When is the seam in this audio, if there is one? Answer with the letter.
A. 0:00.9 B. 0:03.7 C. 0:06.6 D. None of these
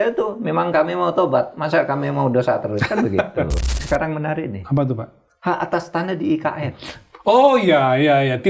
B